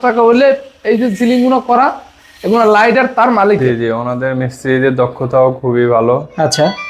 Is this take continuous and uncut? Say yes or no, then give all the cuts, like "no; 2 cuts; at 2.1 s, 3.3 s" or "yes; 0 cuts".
no; 1 cut; at 3.6 s